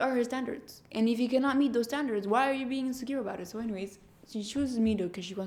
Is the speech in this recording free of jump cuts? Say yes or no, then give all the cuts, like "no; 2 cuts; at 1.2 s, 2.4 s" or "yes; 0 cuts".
yes; 0 cuts